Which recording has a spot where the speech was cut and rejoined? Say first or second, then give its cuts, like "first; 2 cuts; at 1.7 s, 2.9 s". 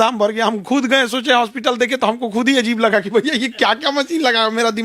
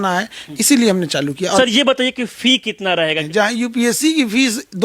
second; 2 cuts; at 1.6 s, 3.2 s